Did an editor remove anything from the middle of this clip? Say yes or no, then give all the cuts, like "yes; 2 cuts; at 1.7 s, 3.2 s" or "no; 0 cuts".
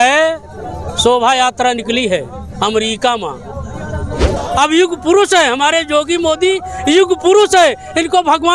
yes; 1 cut; at 4.3 s